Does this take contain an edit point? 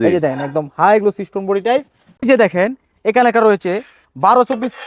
yes; 1 cut; at 2.0 s

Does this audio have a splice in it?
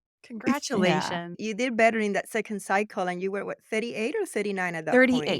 no; 0 cuts

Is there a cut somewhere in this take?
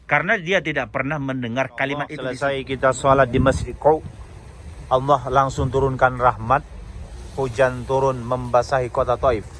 yes; 1 cut; at 2.2 s

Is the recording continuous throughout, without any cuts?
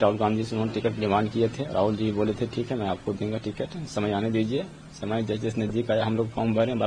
yes; 0 cuts

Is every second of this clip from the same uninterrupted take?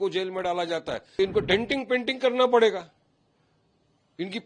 no; 1 cut; at 1.2 s

